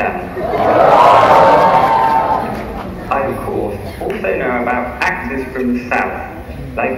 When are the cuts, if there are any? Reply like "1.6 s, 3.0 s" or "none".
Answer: none

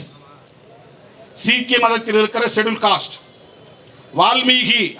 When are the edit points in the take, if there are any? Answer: none

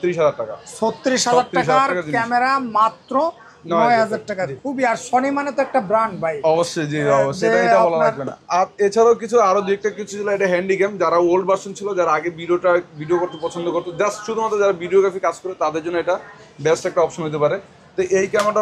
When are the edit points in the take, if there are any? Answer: none

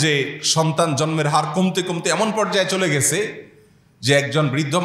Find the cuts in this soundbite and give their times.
none

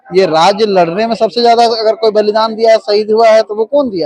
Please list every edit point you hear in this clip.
none

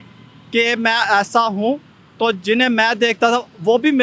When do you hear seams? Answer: none

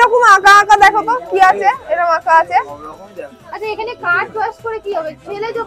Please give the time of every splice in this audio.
3.4 s

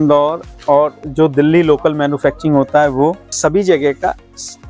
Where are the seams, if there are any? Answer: 3.3 s

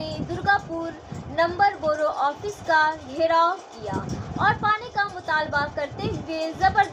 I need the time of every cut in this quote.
none

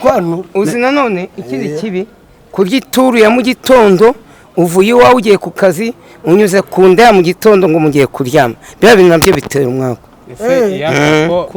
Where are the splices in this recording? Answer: none

